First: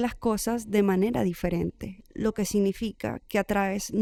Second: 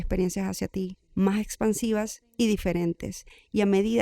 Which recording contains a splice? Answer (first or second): second